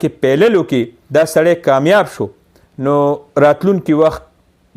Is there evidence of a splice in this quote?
yes; 1 cut; at 1.0 s

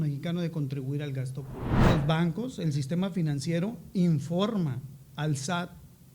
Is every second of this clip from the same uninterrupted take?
no; 1 cut; at 1.8 s

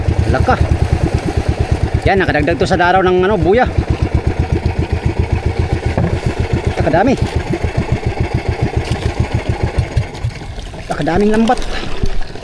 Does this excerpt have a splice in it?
no; 0 cuts

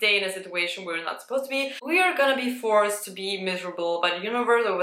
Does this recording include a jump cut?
yes; 1 cut; at 1.8 s

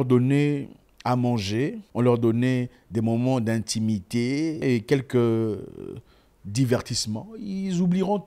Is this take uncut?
no; 2 cuts; at 1.8 s, 4.6 s

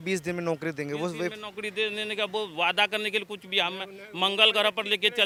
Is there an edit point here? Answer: no; 0 cuts

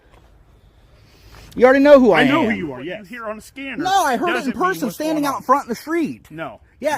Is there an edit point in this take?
yes; 1 cut; at 2.8 s

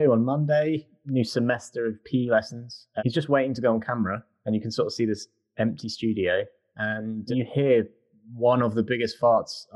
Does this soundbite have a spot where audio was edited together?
yes; 1 cut; at 0.9 s

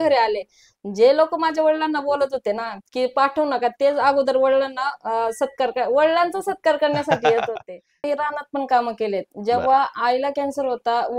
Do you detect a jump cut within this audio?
yes; 1 cut; at 8.0 s

